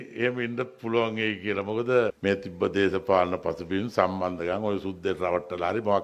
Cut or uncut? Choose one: cut